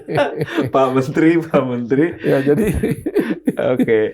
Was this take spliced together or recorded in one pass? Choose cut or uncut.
uncut